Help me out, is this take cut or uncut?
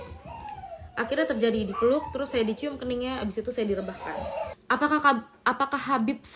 cut